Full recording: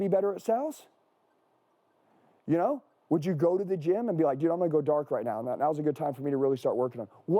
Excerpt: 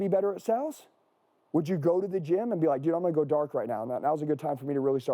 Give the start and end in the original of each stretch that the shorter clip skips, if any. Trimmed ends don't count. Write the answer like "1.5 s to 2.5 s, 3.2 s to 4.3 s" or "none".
1.4 s to 2.9 s